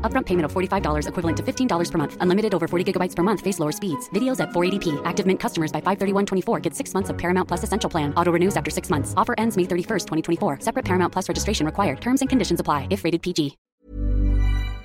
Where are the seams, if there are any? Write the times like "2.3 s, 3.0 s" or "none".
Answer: 13.6 s